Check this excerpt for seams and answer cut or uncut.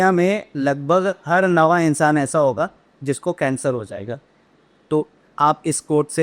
uncut